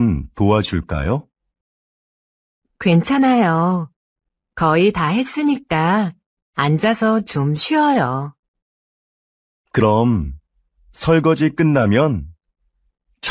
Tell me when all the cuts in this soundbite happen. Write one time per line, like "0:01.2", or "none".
none